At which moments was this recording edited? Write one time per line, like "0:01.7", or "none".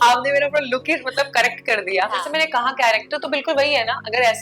0:02.3

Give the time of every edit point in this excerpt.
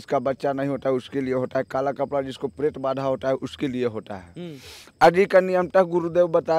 none

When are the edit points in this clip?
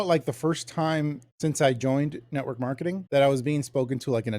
0:01.2
0:03.0

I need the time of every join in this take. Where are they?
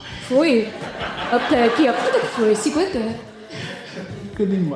none

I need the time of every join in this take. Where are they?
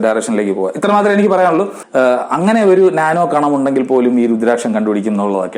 0:01.8

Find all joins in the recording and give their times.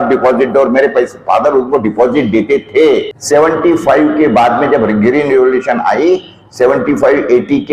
0:03.1

